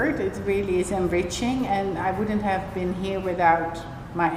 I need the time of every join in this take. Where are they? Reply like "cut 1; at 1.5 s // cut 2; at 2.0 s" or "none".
none